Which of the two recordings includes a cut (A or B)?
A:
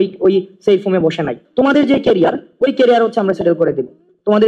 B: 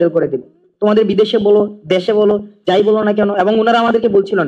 A